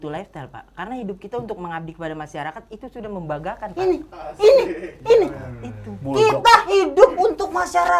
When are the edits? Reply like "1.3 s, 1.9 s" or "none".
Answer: none